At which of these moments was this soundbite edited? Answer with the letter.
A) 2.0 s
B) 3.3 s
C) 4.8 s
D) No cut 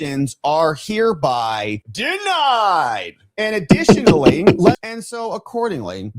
C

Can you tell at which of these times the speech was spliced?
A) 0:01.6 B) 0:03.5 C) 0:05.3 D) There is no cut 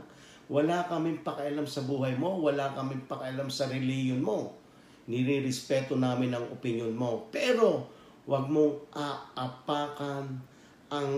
D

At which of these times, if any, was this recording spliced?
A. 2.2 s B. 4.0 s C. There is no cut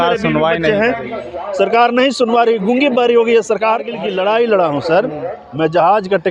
B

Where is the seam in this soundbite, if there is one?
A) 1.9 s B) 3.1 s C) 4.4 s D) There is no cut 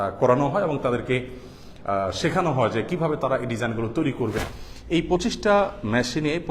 C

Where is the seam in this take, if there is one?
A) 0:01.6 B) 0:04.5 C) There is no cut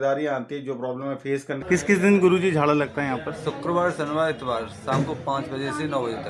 A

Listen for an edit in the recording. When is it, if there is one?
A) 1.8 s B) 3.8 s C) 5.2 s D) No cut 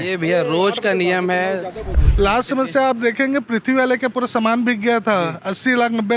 A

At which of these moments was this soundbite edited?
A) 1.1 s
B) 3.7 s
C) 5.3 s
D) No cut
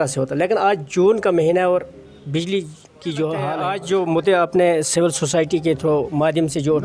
B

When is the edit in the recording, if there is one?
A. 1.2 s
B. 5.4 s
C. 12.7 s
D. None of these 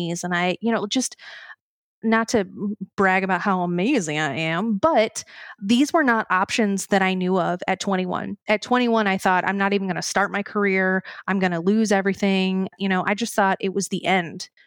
C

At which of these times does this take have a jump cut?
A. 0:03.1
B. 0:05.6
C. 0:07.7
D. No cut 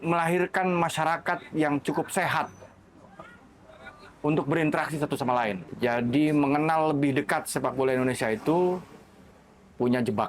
B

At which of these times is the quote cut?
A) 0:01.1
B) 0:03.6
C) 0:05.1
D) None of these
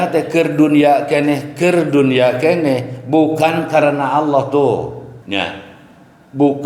C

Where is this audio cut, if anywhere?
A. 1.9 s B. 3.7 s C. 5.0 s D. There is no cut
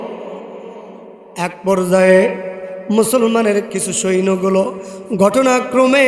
B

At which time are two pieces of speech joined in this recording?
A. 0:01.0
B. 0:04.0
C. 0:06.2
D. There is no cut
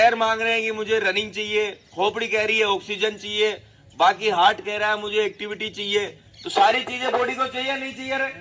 D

